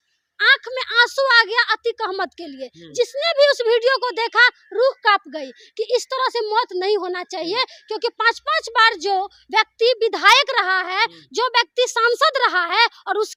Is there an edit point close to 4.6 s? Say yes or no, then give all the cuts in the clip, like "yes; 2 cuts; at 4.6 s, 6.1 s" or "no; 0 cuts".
no; 0 cuts